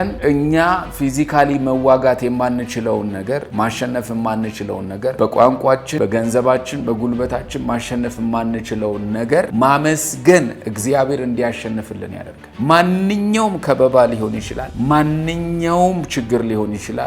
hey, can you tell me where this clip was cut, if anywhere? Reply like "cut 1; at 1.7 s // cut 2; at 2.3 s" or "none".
cut 1; at 3.5 s // cut 2; at 5.1 s // cut 3; at 5.9 s // cut 4; at 9.5 s